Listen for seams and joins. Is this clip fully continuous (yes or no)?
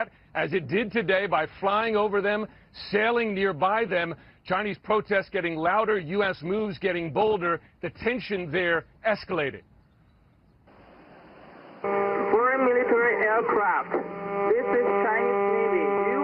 no